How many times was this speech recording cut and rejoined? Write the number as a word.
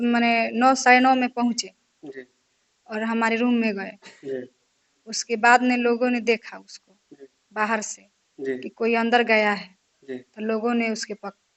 zero